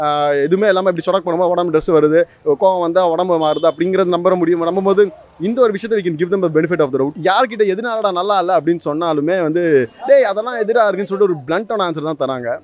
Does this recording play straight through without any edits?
no; 1 cut; at 7.1 s

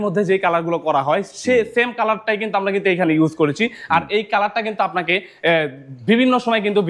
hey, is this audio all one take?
yes; 0 cuts

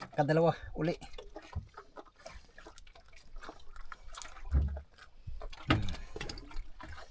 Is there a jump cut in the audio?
no; 0 cuts

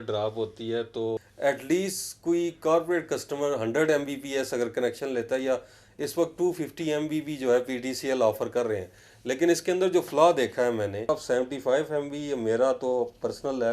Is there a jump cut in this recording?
yes; 2 cuts; at 1.3 s, 11.1 s

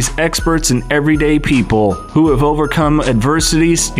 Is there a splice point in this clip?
no; 0 cuts

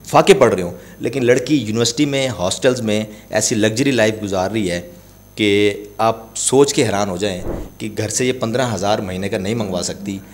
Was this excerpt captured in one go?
yes; 0 cuts

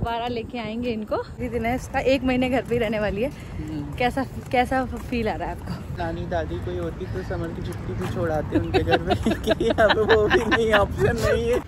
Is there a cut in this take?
yes; 2 cuts; at 1.4 s, 5.9 s

